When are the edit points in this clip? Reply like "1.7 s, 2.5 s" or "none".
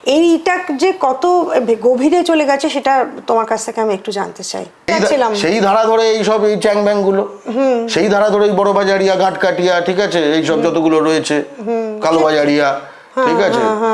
4.9 s